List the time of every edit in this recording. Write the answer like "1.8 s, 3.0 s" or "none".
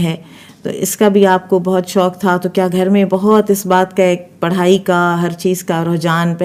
none